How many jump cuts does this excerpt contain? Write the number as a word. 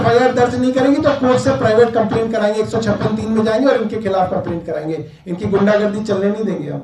zero